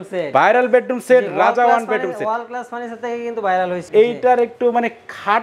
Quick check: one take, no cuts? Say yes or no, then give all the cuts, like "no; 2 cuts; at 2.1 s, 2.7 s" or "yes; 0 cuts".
yes; 0 cuts